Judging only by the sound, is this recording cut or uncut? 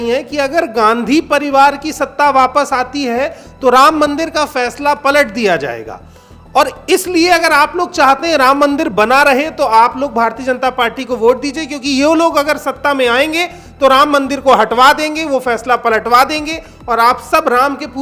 uncut